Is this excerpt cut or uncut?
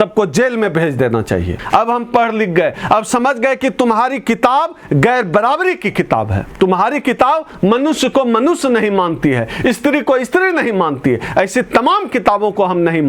cut